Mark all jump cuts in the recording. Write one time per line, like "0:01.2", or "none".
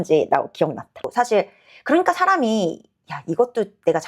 0:01.1